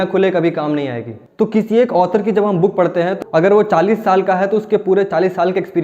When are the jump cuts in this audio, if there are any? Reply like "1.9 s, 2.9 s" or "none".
1.2 s, 3.2 s